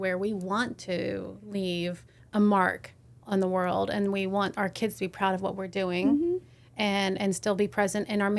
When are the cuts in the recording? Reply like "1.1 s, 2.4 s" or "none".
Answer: 2.1 s